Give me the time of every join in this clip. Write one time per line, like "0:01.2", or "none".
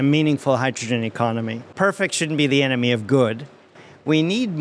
0:01.6
0:03.7